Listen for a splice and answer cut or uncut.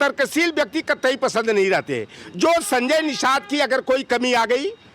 uncut